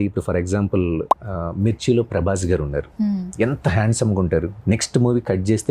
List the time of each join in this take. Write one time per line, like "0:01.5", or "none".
0:04.5